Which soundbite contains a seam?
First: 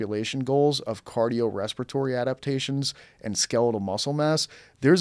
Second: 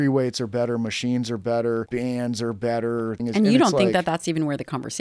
second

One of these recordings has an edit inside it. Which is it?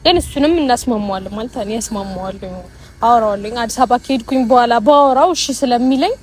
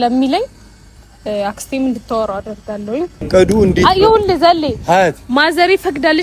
second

